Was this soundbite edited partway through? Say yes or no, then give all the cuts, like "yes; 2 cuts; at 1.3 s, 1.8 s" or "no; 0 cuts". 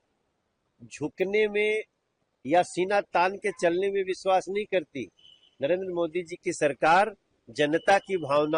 no; 0 cuts